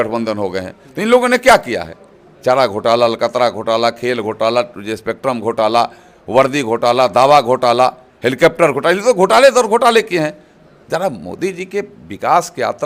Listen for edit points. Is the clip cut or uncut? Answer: uncut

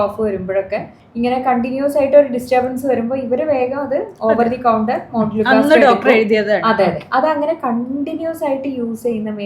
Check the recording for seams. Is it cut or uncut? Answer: cut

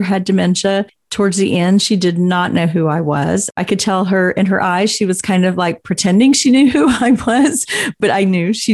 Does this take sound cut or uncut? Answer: cut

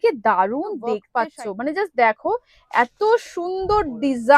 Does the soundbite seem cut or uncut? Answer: cut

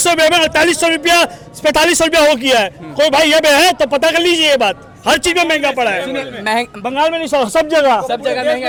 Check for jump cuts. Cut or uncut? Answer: uncut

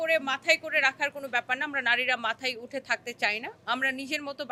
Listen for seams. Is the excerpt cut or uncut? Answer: uncut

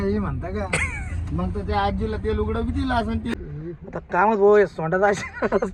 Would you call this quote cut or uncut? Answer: cut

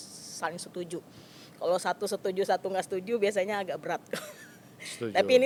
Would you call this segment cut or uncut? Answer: uncut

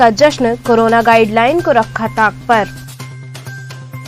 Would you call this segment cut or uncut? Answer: uncut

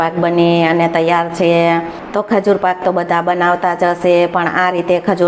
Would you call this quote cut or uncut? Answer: cut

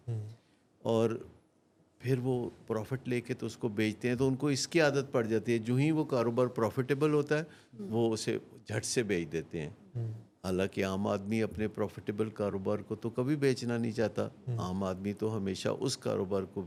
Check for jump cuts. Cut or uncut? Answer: uncut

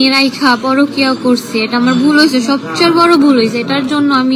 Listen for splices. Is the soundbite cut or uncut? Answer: uncut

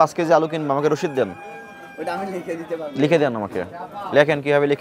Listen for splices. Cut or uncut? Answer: uncut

